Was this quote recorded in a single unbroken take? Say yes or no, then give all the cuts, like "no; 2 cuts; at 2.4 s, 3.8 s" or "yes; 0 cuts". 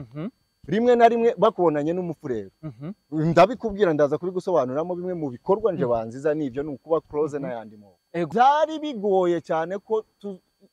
no; 1 cut; at 8.3 s